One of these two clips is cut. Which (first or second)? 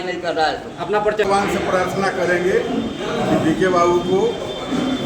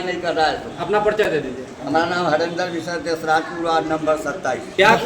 first